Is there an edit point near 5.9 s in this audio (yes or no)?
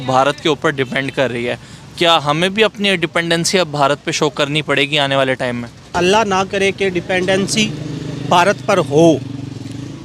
yes